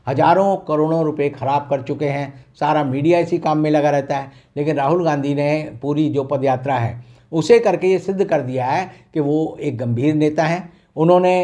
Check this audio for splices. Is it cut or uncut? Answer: uncut